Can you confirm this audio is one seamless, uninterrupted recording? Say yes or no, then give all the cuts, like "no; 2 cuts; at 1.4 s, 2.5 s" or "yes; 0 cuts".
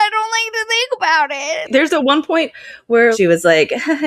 no; 2 cuts; at 1.7 s, 3.1 s